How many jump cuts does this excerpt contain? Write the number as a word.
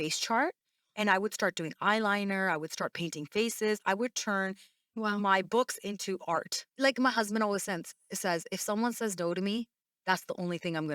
one